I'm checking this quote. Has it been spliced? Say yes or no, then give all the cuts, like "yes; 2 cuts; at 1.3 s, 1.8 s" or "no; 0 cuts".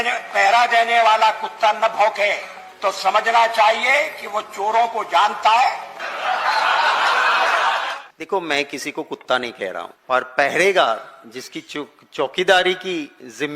yes; 2 cuts; at 8.1 s, 9.9 s